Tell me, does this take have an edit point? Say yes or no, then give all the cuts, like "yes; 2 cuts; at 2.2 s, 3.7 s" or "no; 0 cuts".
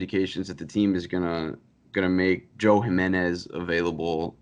no; 0 cuts